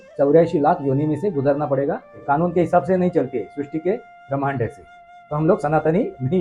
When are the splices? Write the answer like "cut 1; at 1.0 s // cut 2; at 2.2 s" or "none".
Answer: cut 1; at 2.2 s